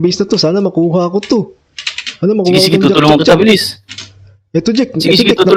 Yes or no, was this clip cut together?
no